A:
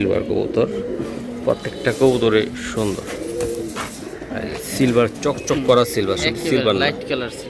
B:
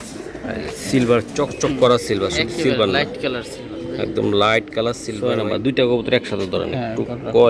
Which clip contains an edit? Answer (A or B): B